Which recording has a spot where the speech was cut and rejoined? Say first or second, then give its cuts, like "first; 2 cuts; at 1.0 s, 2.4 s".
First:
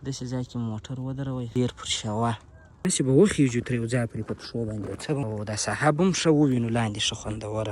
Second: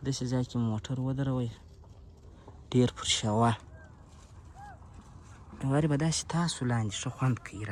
first; 3 cuts; at 1.5 s, 2.9 s, 5.2 s